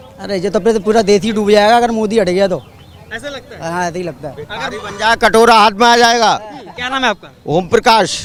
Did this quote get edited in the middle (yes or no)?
no